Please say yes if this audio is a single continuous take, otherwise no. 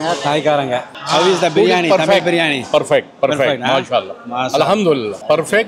yes